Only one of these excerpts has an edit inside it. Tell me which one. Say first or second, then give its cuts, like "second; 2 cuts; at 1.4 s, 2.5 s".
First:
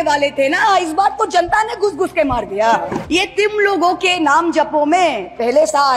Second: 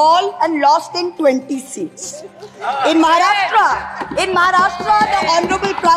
first; 1 cut; at 3.0 s